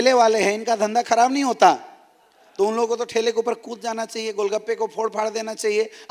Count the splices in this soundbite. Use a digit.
0